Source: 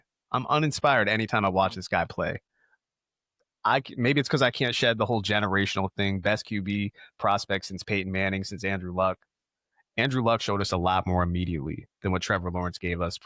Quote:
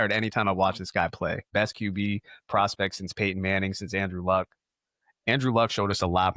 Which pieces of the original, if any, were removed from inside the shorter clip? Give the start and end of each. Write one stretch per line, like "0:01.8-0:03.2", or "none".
0:02.5-0:06.2